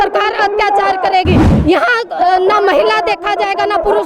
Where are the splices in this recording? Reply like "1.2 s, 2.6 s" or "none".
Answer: none